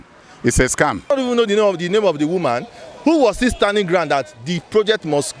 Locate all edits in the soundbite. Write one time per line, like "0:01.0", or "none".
0:01.1